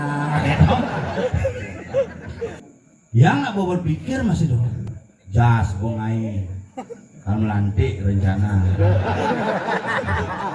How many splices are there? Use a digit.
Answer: 1